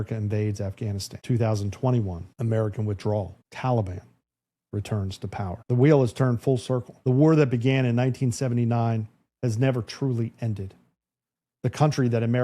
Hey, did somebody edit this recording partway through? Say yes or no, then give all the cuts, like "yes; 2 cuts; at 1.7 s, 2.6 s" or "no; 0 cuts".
yes; 5 cuts; at 1.1 s, 2.2 s, 3.4 s, 5.6 s, 6.9 s